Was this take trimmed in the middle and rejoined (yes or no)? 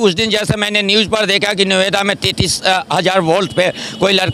no